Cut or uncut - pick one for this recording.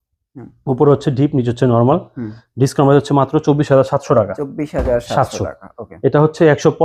uncut